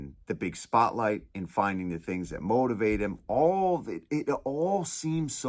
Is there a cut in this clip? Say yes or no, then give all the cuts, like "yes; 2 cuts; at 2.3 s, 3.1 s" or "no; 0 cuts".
no; 0 cuts